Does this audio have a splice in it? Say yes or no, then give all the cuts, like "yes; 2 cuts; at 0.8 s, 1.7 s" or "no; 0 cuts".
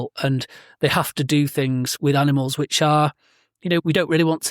yes; 2 cuts; at 1.9 s, 3.8 s